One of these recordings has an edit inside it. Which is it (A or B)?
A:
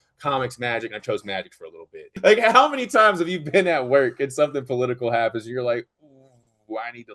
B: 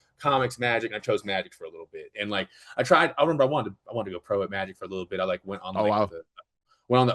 A